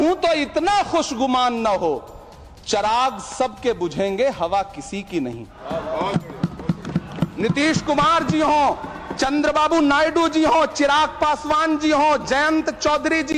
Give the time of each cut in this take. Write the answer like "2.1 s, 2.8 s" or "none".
5.5 s